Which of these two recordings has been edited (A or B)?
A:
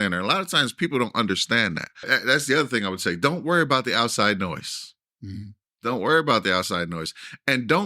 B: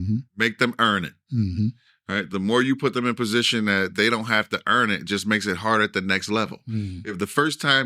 A